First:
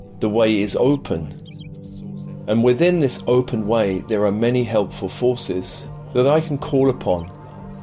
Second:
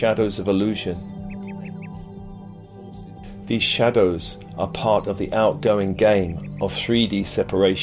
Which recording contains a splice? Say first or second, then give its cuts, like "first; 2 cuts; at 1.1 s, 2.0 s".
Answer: second; 2 cuts; at 1.0 s, 2.9 s